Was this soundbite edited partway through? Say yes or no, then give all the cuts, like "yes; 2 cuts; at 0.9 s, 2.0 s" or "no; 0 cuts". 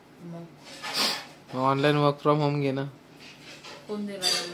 no; 0 cuts